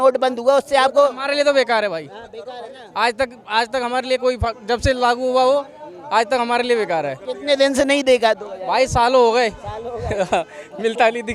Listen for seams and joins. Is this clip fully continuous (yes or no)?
yes